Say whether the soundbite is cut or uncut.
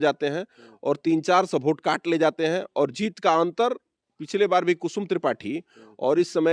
uncut